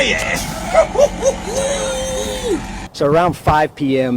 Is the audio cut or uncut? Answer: cut